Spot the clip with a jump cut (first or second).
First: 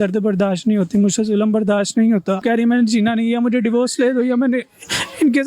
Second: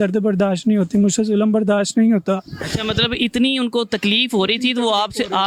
first